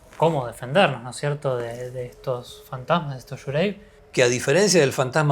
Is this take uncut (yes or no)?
no